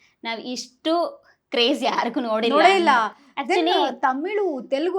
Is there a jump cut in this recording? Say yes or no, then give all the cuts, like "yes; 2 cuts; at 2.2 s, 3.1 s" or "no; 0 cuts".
no; 0 cuts